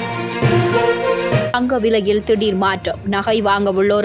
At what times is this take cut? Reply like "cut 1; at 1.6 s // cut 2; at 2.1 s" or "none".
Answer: cut 1; at 1.5 s